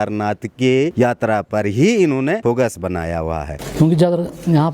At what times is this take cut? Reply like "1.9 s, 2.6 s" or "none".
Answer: 0.9 s, 2.4 s, 3.6 s